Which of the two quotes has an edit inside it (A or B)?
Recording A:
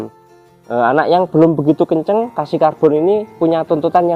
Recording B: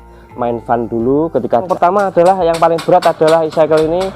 B